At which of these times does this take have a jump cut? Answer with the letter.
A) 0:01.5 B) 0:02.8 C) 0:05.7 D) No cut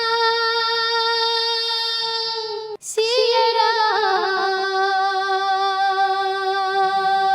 B